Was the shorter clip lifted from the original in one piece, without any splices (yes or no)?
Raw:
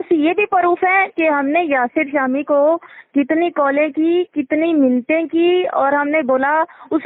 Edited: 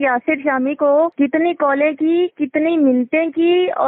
no